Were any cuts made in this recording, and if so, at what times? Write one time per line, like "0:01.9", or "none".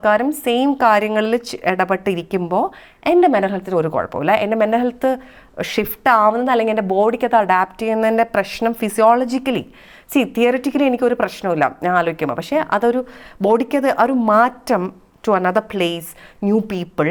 none